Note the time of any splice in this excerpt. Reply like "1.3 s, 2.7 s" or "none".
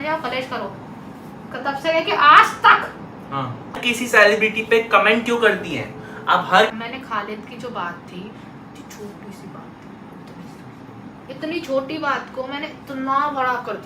3.8 s, 6.7 s